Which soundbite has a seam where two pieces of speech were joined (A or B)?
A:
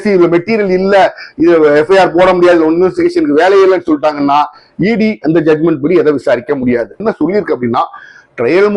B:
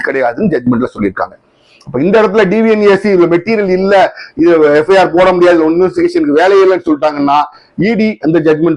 A